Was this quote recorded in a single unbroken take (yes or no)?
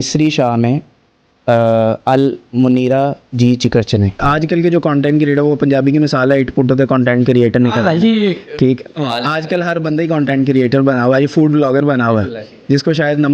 no